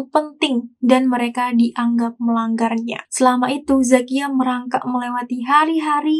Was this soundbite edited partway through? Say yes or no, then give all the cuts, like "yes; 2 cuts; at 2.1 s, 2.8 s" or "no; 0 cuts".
yes; 1 cut; at 3.0 s